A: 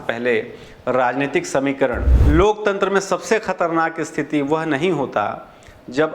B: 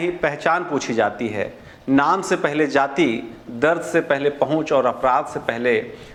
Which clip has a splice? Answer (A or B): A